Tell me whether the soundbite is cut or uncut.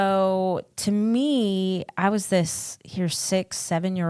uncut